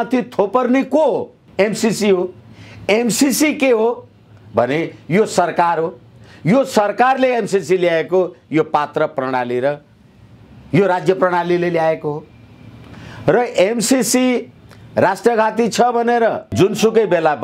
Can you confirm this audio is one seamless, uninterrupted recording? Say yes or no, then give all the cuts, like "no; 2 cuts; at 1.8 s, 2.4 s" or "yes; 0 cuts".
no; 2 cuts; at 1.4 s, 16.5 s